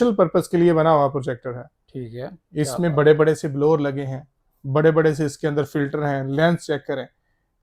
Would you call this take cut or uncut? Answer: uncut